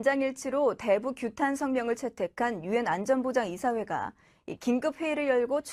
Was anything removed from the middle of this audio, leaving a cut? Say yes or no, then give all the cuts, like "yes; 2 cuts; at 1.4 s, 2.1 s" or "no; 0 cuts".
no; 0 cuts